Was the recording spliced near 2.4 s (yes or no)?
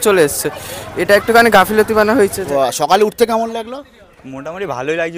yes